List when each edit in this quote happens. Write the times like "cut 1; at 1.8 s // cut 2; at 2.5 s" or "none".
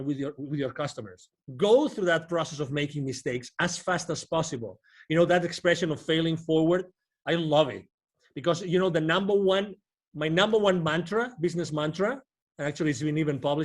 cut 1; at 1.4 s